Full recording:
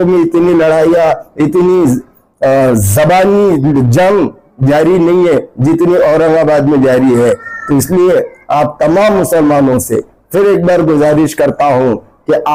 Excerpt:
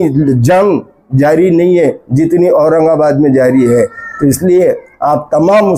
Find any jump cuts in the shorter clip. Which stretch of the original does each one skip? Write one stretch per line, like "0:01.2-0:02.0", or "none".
none